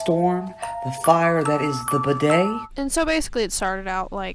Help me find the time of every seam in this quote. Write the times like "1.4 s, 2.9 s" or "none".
2.6 s